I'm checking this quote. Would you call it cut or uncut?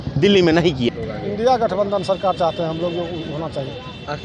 cut